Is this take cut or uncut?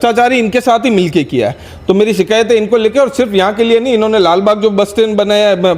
uncut